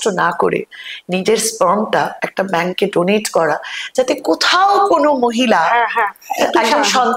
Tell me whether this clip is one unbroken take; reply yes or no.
yes